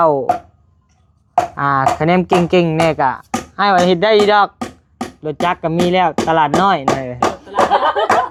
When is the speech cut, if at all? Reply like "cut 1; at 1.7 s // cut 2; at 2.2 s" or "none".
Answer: none